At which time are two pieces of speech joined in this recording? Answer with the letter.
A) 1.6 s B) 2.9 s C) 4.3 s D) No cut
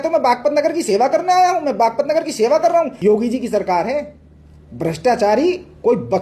B